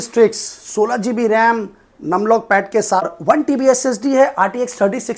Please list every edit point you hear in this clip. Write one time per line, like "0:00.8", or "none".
0:03.1